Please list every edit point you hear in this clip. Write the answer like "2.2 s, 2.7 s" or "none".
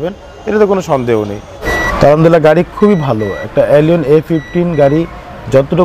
1.6 s